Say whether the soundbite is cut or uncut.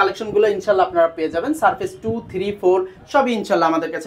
uncut